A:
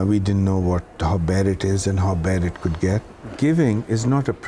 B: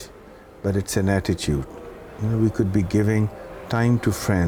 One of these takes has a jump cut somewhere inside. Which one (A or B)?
A